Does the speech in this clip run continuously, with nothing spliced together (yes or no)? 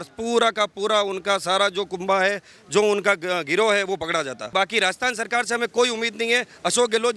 no